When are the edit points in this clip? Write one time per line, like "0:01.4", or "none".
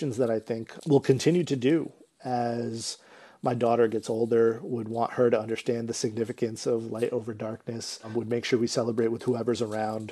none